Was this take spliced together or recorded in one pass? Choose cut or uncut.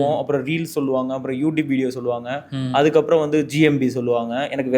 uncut